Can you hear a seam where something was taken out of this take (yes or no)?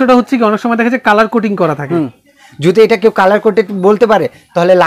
no